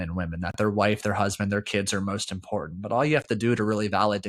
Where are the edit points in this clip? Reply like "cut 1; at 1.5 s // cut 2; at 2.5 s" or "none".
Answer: none